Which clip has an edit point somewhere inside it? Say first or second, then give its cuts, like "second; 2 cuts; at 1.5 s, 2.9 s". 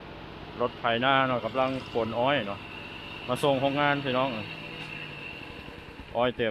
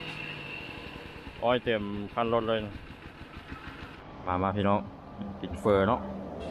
second; 1 cut; at 4.0 s